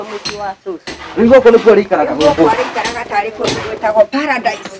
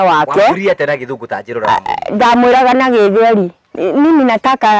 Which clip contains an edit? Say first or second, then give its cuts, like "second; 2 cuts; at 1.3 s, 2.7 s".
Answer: second; 1 cut; at 3.6 s